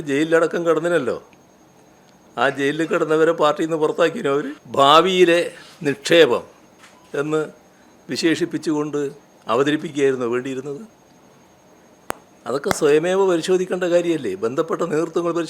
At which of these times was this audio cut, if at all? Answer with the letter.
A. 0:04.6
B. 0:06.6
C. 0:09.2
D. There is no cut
A